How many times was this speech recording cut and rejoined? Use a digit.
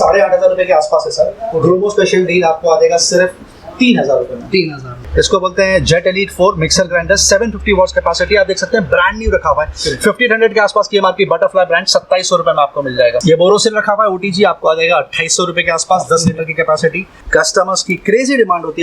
3